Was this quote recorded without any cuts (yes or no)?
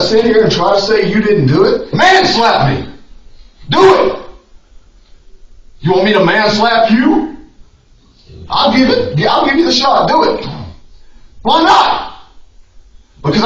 no